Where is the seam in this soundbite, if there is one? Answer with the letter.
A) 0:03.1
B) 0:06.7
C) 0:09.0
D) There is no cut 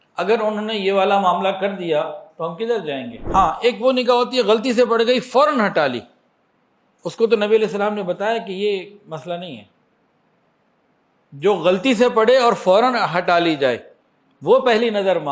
A